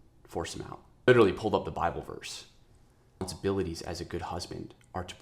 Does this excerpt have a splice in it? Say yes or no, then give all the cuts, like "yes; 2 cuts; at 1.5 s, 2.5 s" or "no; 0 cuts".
yes; 2 cuts; at 1.1 s, 3.3 s